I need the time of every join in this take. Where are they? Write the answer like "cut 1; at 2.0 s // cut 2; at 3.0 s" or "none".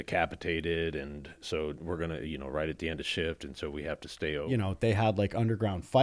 cut 1; at 4.4 s